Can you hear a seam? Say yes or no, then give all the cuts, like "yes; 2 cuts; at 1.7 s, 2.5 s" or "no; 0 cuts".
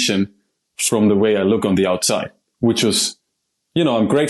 no; 0 cuts